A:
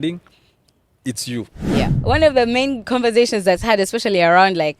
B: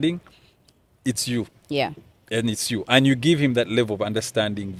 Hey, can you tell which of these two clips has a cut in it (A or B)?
A